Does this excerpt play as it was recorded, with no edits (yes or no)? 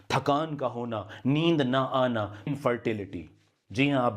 no